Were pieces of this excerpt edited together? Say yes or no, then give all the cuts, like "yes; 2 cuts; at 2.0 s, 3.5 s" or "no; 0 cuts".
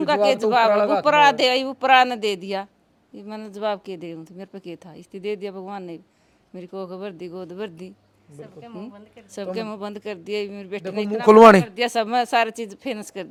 no; 0 cuts